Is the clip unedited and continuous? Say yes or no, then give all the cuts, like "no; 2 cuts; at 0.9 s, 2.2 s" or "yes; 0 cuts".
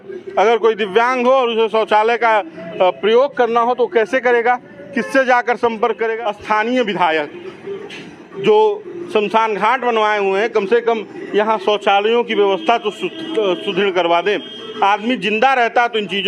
no; 1 cut; at 6.1 s